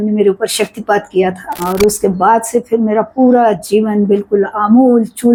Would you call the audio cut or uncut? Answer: uncut